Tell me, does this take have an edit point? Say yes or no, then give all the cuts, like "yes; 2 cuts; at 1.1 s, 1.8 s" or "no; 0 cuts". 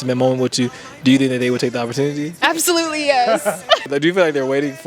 yes; 2 cuts; at 2.3 s, 3.9 s